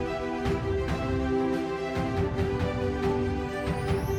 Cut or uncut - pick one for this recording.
uncut